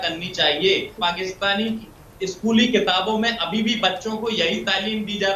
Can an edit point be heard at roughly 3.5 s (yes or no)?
no